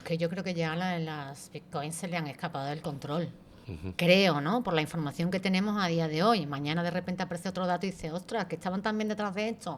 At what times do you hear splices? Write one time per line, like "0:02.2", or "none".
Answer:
none